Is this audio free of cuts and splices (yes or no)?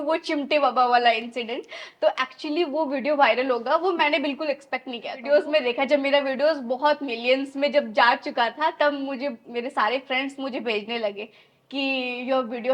no